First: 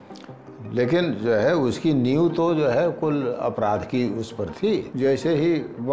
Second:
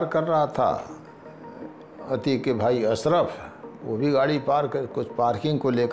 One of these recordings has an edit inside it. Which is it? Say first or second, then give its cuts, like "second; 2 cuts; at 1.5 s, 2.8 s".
first; 1 cut; at 4.9 s